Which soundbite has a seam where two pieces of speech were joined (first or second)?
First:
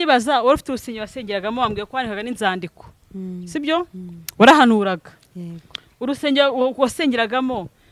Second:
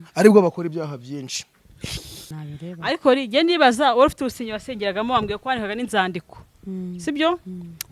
second